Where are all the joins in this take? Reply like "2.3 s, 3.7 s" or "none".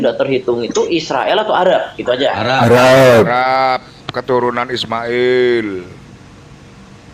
none